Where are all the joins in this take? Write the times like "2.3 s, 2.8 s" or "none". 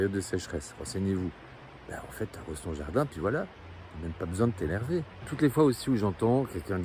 none